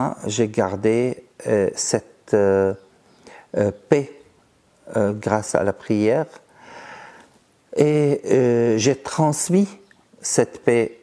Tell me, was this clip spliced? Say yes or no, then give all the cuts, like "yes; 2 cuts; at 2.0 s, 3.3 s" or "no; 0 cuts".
no; 0 cuts